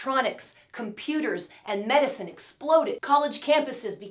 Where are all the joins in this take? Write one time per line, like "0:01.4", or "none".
0:02.9